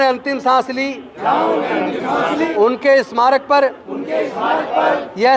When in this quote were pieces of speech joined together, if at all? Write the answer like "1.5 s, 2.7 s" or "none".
2.5 s